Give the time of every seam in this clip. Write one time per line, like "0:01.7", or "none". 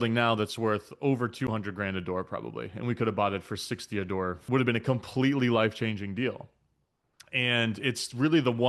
0:04.4